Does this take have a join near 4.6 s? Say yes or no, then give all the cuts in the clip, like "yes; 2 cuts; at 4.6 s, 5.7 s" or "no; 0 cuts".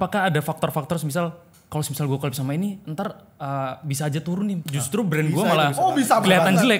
yes; 1 cut; at 4.6 s